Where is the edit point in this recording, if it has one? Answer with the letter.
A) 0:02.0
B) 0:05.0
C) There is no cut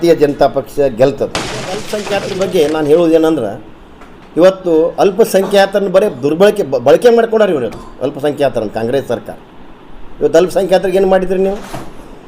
A